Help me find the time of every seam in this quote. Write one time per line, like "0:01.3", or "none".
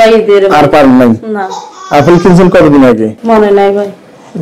0:03.2